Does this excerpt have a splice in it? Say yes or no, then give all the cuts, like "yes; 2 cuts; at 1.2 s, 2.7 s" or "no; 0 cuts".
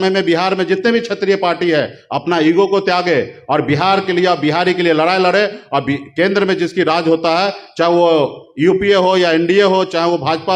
no; 0 cuts